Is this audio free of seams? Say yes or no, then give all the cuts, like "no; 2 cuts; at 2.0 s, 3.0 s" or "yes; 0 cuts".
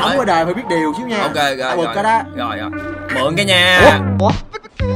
yes; 0 cuts